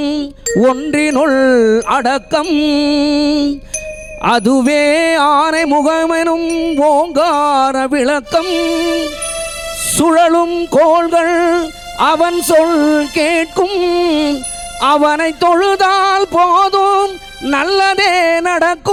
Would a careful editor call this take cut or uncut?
uncut